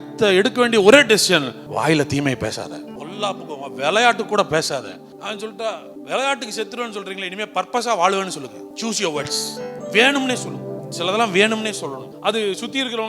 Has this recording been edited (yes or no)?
yes